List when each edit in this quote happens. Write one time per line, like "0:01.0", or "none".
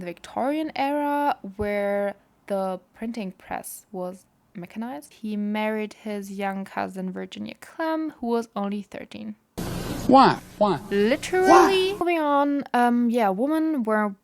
0:05.1
0:12.0